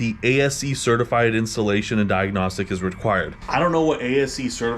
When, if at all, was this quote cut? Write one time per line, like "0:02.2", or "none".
0:03.4